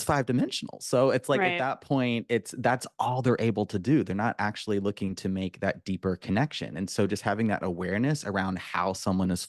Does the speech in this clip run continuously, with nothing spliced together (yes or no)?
yes